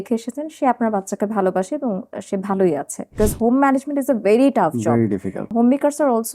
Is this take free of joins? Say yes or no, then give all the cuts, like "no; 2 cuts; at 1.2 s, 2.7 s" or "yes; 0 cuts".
no; 2 cuts; at 3.1 s, 5.4 s